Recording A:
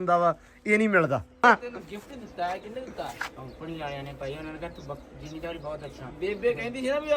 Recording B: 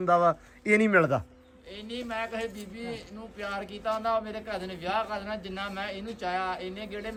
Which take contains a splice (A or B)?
A